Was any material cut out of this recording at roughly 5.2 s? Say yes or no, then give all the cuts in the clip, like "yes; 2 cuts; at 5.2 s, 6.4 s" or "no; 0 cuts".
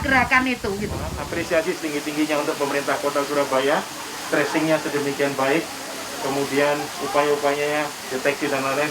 no; 1 cut; at 1.1 s